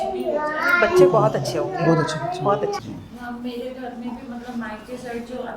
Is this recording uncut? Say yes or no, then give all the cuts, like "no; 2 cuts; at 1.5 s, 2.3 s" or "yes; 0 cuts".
yes; 0 cuts